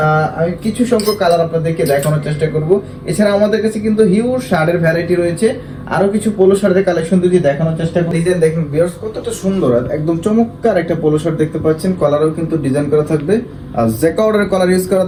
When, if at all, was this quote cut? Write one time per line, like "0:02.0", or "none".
none